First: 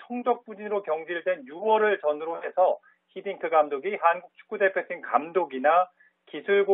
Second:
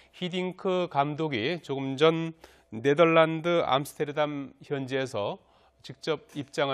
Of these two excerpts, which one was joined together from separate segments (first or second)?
first